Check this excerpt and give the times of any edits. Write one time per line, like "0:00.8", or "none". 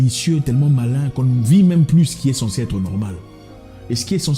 none